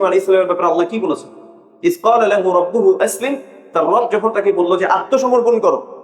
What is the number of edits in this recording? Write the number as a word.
one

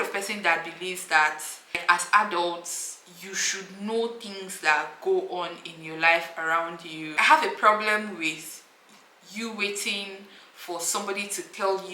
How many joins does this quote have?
two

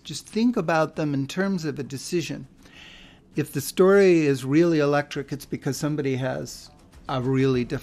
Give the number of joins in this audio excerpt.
one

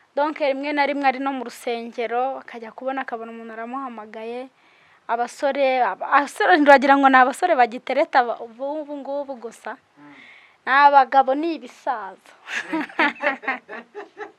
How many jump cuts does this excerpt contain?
zero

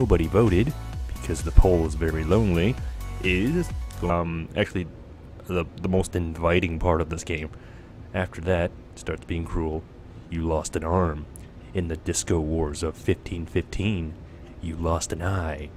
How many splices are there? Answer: zero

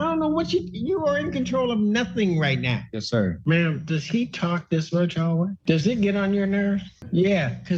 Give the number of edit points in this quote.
two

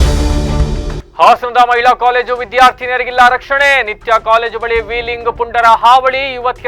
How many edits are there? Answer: one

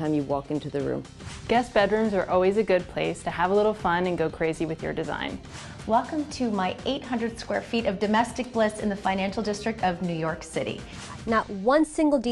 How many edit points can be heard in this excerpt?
three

